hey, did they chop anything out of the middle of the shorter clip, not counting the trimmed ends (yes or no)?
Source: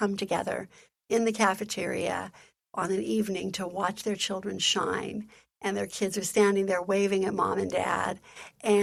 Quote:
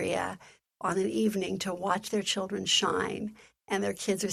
no